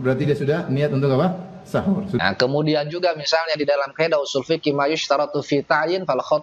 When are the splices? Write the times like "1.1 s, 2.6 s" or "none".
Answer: 2.2 s